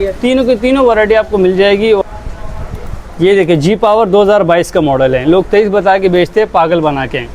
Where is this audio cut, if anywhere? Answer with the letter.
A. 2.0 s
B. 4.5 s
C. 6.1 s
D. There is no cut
A